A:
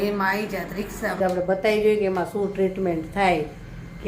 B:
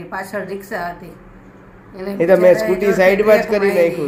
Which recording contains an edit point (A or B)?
A